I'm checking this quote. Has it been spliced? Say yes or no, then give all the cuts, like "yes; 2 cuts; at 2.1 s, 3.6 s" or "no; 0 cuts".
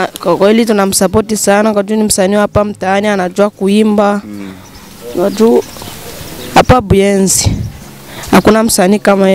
no; 0 cuts